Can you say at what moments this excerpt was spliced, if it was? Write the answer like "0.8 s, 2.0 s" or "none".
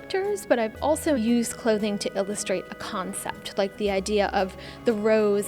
1.2 s

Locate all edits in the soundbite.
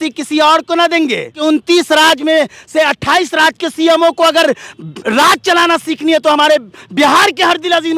1.4 s

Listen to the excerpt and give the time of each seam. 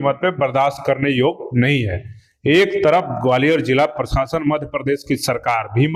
none

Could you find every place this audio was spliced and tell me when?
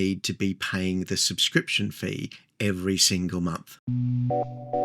3.7 s

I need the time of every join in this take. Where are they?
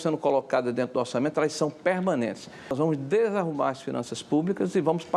2.7 s

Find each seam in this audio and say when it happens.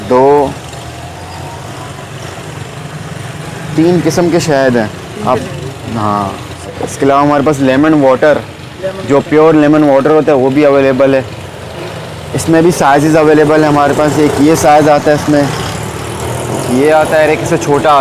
6.7 s

